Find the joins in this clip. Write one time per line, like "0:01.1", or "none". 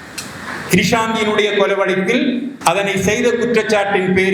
0:02.5